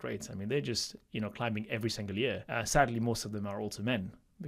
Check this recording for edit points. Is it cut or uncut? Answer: cut